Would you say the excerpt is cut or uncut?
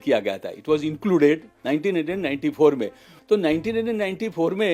cut